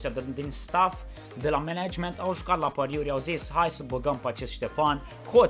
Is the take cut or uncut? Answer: uncut